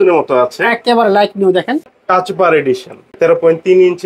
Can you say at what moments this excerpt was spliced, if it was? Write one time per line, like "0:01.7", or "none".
0:01.9
0:03.0